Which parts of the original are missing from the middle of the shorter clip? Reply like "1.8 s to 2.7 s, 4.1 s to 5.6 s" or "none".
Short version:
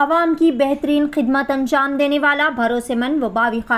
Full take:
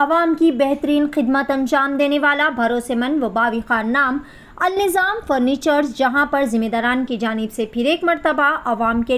none